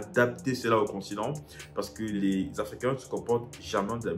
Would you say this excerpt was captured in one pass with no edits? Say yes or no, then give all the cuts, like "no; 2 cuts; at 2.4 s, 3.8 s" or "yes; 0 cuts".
no; 1 cut; at 2.1 s